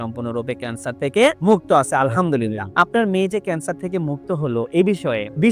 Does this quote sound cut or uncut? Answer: uncut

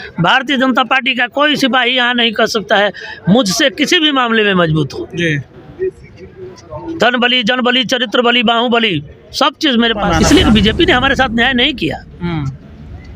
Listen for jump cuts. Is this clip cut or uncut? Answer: cut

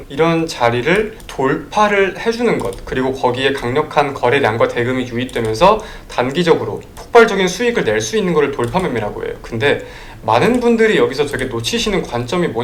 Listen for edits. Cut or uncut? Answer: uncut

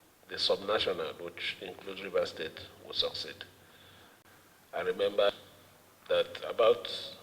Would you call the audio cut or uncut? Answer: cut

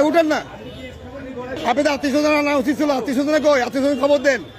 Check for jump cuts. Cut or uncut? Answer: cut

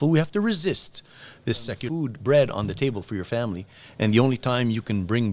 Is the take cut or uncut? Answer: cut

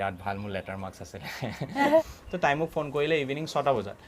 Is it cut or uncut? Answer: cut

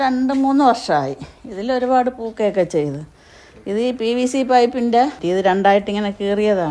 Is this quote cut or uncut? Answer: cut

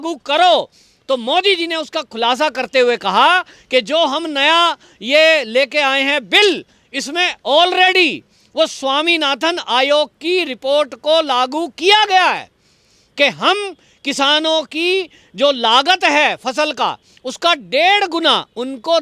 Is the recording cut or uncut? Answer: uncut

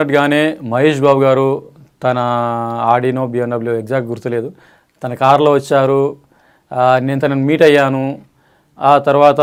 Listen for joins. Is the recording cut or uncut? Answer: uncut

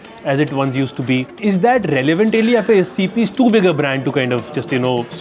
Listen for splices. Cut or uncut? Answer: cut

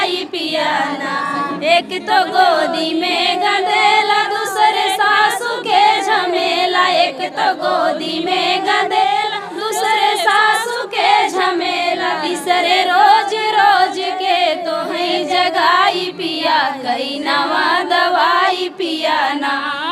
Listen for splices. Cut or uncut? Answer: uncut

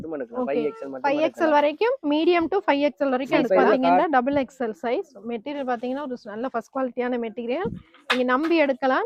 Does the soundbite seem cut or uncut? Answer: uncut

